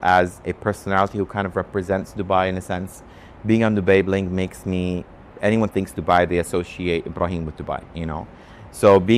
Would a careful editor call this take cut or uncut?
uncut